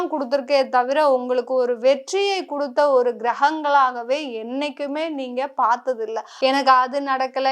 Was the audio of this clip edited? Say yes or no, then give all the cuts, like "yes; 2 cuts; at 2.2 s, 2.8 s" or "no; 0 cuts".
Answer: yes; 1 cut; at 6.3 s